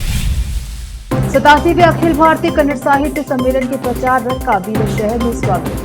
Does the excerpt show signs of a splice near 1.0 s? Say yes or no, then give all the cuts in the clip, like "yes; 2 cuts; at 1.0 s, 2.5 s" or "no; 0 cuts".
yes; 1 cut; at 1.0 s